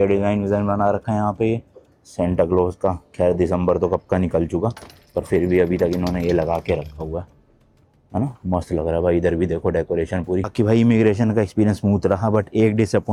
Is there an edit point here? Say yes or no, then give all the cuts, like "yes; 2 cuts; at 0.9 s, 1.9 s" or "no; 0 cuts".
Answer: no; 0 cuts